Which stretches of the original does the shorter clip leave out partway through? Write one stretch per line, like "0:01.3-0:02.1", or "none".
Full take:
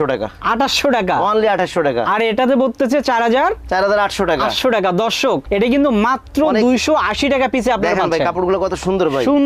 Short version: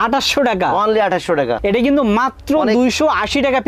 0:02.0-0:05.4